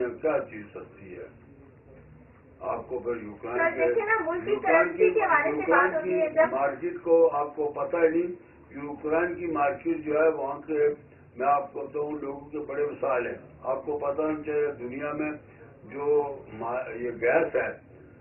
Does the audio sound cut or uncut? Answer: uncut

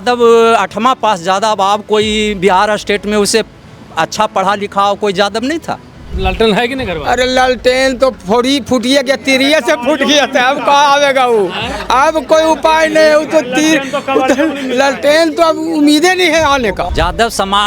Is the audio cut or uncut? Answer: cut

